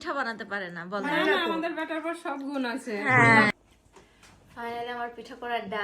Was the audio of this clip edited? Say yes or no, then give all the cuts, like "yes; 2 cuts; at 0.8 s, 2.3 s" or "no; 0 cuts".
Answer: yes; 1 cut; at 3.5 s